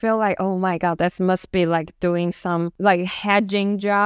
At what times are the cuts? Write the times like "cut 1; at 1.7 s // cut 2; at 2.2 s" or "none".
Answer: cut 1; at 2.7 s